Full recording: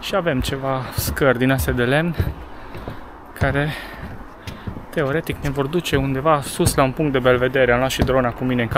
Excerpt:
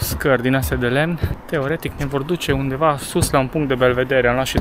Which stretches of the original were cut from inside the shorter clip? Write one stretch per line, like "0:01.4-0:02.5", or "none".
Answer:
0:02.3-0:04.8